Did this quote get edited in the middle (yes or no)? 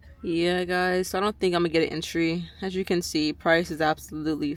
no